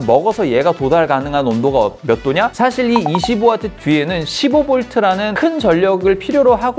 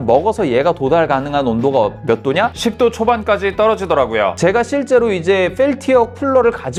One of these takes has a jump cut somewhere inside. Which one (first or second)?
first